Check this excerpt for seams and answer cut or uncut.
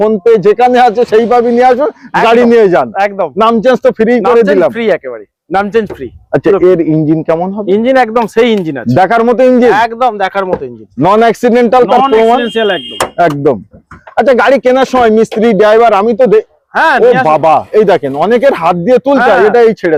uncut